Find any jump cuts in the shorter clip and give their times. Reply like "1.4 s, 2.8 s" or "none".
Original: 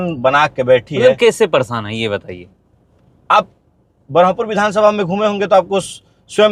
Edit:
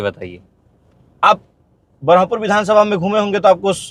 none